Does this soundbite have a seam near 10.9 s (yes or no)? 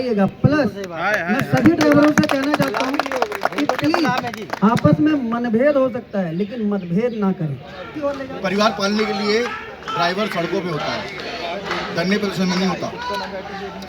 no